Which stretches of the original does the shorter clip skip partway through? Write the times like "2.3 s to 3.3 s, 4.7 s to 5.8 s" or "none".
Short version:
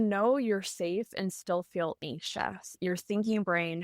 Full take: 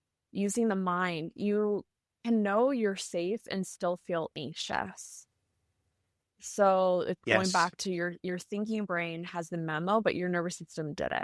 5.1 s to 8.2 s

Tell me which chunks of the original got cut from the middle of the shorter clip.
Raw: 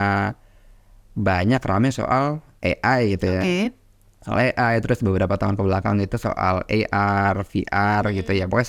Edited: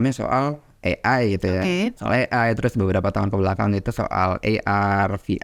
3.8 s to 4.2 s

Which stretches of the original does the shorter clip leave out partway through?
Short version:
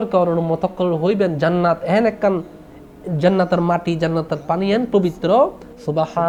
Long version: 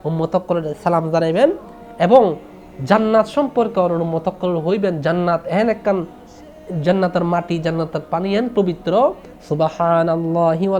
none

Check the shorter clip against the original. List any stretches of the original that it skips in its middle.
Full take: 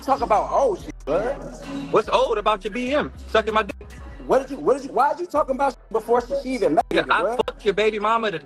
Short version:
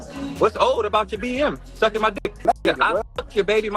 4.0 s to 6.7 s

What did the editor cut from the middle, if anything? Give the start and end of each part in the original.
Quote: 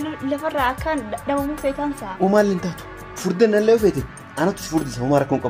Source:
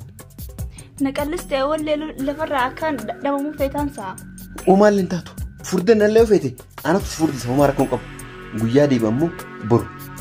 4.0 s to 4.6 s

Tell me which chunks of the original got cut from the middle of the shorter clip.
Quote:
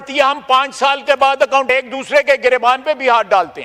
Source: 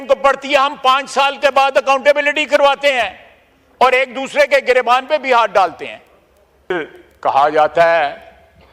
2.0 s to 3.9 s

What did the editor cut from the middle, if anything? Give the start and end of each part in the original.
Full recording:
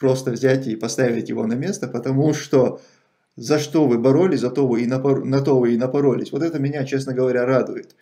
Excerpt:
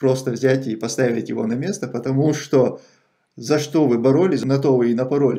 4.4 s to 5.3 s

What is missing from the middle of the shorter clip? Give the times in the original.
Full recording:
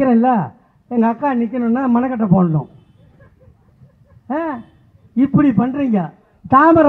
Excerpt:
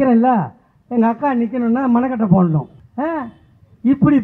2.8 s to 4.1 s

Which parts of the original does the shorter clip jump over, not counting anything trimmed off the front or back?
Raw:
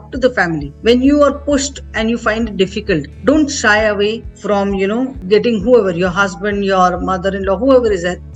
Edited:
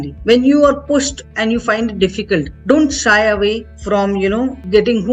none

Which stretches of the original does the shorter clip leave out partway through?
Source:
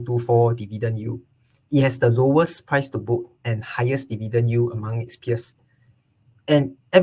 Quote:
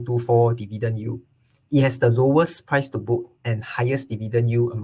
none

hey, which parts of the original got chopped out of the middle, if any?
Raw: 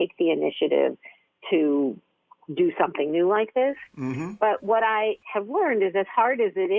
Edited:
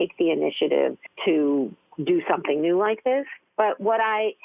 1.1 s to 1.3 s, 2.1 s to 2.4 s, 3.9 s to 4.2 s

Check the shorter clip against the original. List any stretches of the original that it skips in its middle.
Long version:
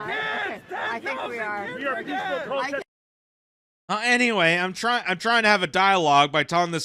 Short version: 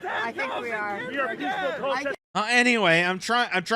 2.9 s to 3.8 s

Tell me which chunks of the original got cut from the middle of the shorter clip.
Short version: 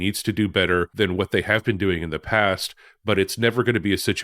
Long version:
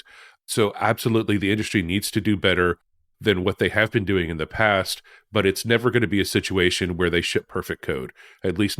2.8 s to 3.2 s

